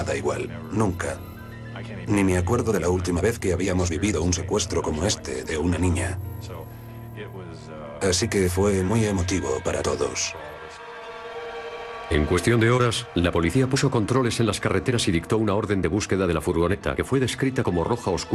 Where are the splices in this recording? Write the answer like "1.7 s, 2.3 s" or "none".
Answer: 15.4 s